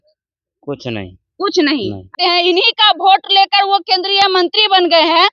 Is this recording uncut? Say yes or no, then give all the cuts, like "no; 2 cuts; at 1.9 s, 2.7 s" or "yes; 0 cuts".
no; 1 cut; at 2.1 s